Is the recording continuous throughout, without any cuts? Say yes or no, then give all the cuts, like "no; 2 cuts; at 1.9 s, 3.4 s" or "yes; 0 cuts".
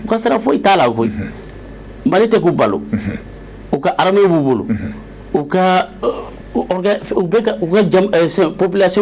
yes; 0 cuts